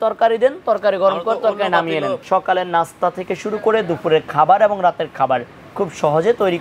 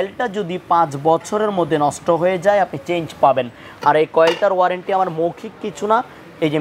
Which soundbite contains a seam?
first; 1 cut; at 2.2 s

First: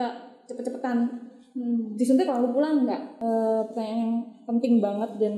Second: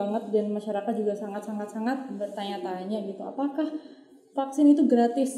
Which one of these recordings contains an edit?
first; 1 cut; at 3.2 s

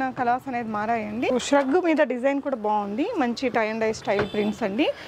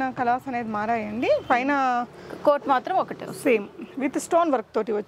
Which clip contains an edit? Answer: first; 1 cut; at 1.3 s

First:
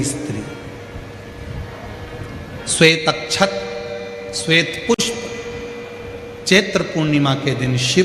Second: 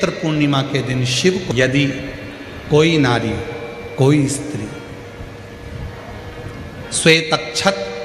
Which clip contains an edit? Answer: second; 1 cut; at 1.5 s

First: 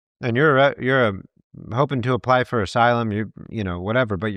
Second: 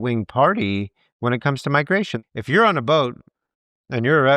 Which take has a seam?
second; 1 cut; at 2.1 s

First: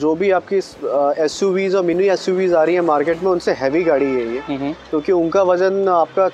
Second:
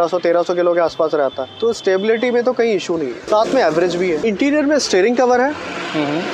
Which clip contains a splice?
second; 3 cuts; at 1.5 s, 3.2 s, 4.2 s

